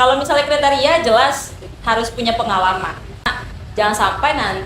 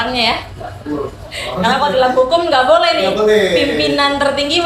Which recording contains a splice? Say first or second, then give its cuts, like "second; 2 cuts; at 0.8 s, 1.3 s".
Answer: first; 1 cut; at 3.4 s